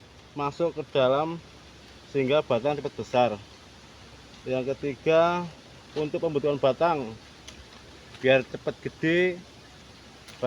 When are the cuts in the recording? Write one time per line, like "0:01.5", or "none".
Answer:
none